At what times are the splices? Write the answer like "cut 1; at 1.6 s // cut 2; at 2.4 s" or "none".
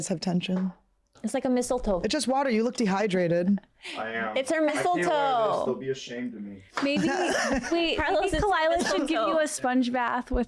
none